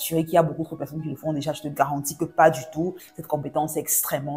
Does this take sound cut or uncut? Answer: cut